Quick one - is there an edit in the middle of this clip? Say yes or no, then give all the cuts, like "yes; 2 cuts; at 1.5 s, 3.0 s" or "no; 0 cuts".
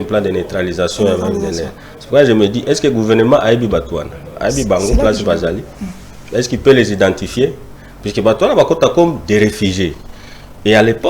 no; 0 cuts